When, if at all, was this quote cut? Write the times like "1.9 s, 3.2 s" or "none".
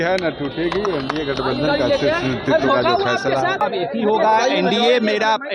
3.6 s